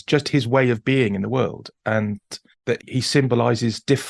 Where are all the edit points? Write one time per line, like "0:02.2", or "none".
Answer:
0:02.9